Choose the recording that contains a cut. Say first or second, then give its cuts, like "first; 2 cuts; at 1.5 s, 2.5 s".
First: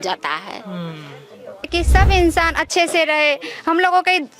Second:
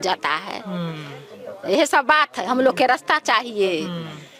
first; 1 cut; at 1.7 s